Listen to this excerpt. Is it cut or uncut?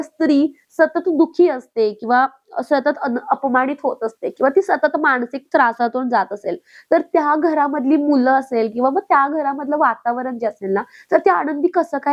uncut